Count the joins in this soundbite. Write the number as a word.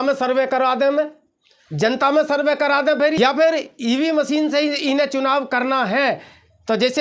one